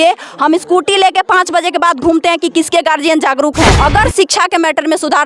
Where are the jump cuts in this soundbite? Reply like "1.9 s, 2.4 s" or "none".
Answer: 3.8 s